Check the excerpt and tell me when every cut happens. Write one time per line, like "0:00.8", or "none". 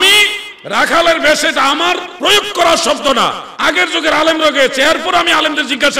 0:02.1
0:03.5